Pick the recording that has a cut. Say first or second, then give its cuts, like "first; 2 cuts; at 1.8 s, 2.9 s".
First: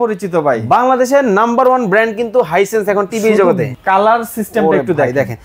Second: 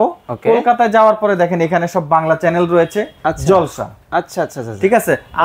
first; 1 cut; at 3.7 s